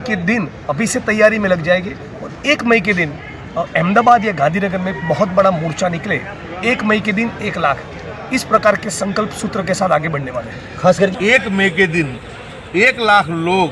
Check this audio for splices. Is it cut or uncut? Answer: cut